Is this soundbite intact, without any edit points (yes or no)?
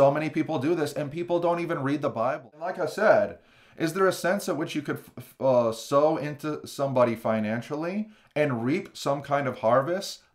no